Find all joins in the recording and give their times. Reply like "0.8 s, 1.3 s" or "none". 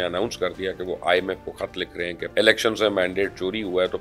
2.2 s